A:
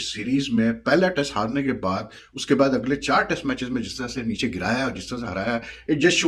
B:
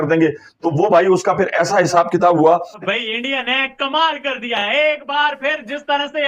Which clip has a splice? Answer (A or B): B